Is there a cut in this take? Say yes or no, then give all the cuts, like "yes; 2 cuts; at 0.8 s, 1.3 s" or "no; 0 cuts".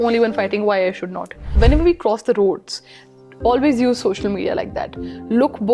yes; 1 cut; at 1.5 s